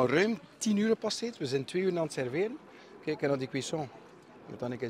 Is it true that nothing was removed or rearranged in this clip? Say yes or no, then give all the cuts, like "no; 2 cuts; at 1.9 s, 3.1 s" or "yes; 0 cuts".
yes; 0 cuts